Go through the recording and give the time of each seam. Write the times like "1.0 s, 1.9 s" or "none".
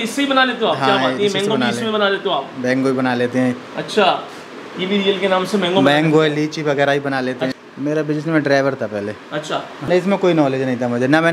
7.7 s, 9.9 s